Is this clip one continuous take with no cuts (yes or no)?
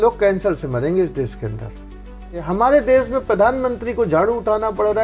no